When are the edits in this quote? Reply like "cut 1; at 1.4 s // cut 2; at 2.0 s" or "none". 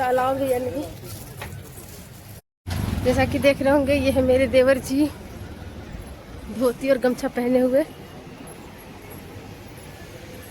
cut 1; at 2.6 s